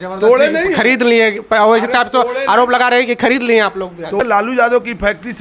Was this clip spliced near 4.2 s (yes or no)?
yes